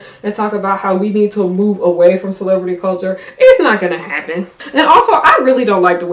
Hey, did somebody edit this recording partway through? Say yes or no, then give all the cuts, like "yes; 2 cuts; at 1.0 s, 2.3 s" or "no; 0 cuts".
yes; 1 cut; at 4.6 s